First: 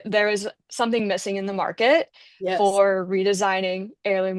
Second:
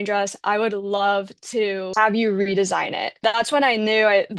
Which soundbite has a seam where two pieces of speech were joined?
second; 2 cuts; at 1.9 s, 3.2 s

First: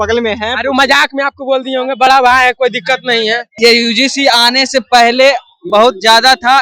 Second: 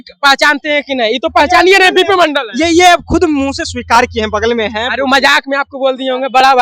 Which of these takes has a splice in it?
first; 1 cut; at 3.5 s

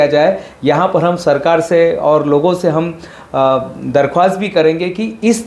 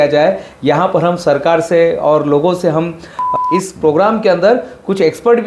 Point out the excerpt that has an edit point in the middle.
second; 1 cut; at 3.2 s

